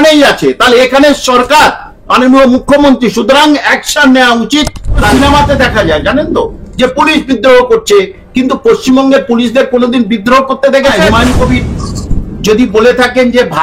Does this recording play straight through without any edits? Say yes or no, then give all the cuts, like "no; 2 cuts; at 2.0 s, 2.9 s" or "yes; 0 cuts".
no; 2 cuts; at 5.1 s, 11.0 s